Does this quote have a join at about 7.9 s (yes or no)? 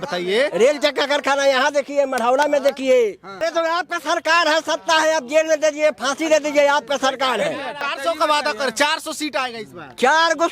yes